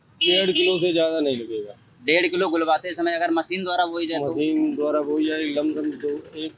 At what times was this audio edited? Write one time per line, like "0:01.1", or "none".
none

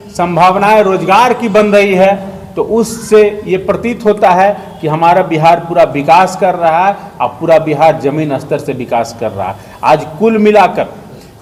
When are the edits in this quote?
none

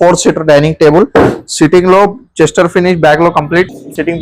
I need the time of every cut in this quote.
none

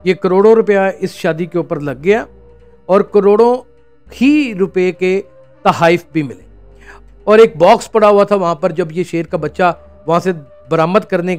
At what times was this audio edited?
0:07.0

